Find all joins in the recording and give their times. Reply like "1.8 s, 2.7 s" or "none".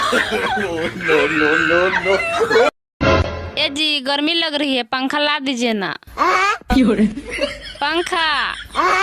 2.9 s